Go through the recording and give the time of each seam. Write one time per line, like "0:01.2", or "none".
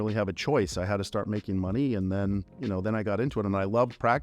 0:02.5